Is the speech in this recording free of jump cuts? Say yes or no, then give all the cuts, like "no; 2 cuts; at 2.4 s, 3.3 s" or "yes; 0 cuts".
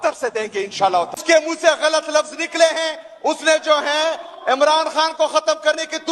no; 1 cut; at 1.2 s